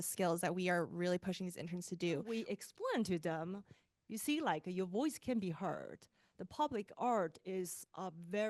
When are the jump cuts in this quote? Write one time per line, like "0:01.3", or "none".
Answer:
0:02.2